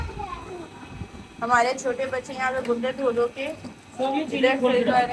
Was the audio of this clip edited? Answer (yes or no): no